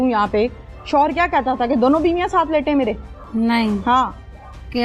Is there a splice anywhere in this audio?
no; 0 cuts

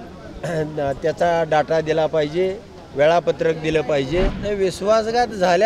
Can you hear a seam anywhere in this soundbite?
yes; 1 cut; at 4.4 s

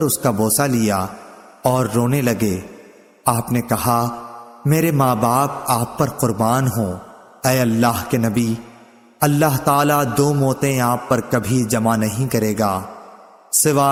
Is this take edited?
no; 0 cuts

